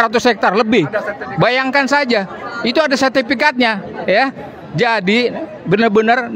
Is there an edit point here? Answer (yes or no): no